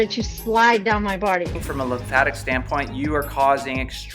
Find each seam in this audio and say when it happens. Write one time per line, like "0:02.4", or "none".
0:01.5